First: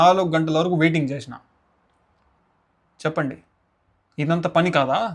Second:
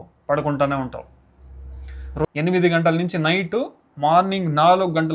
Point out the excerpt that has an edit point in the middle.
second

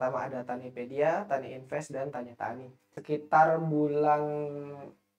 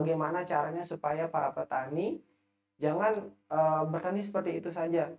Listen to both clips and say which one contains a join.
first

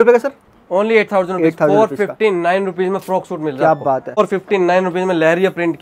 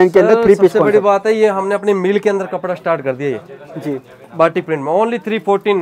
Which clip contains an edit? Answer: first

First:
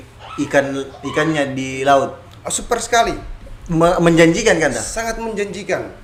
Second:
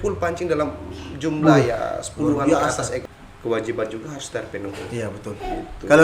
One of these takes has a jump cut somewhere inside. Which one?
second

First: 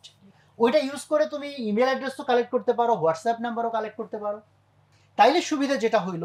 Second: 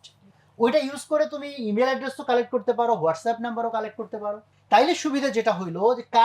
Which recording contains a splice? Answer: second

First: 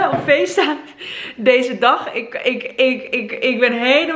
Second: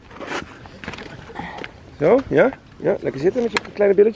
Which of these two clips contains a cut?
second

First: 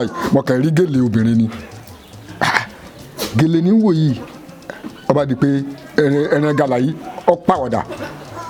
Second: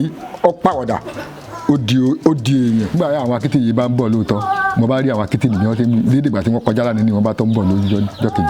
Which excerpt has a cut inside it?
second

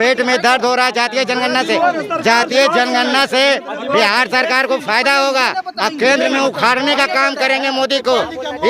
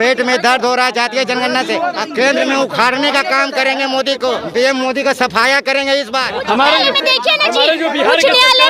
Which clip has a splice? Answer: second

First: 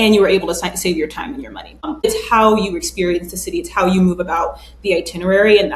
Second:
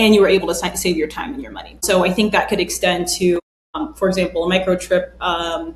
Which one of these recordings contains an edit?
first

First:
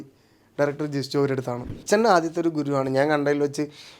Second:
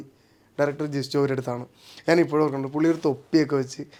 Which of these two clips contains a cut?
first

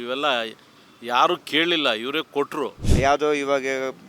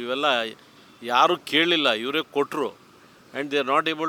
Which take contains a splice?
first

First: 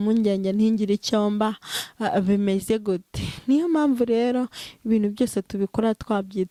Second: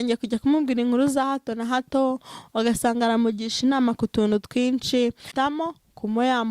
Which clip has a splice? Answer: second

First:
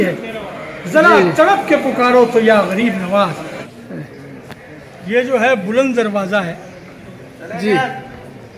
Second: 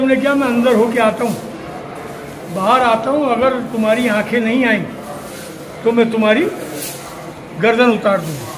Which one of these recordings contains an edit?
first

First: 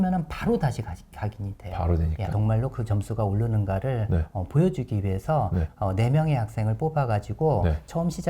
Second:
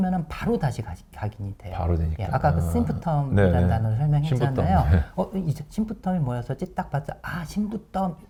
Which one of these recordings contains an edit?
first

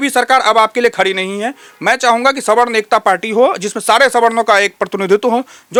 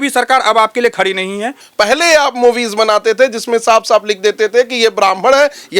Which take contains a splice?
second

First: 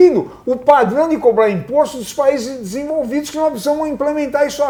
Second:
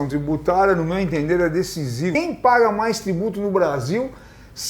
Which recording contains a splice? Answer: second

